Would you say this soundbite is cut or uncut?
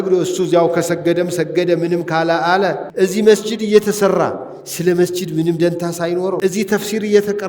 cut